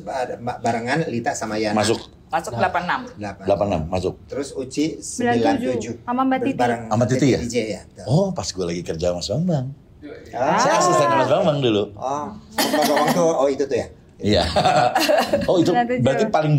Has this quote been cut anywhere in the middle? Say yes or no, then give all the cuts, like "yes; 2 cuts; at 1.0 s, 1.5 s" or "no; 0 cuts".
no; 0 cuts